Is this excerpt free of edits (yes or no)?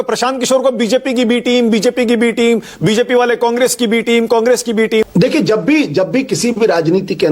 no